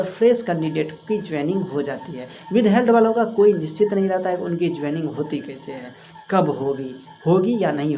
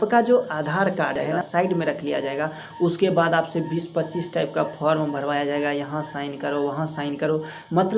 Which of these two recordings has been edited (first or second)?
second